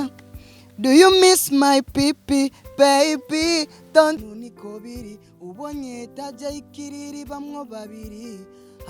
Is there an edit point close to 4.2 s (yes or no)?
yes